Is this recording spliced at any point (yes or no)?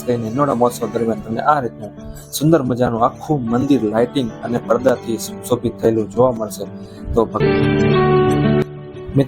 yes